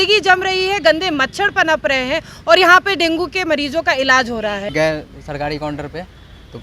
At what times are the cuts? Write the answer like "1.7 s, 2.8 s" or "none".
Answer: 4.7 s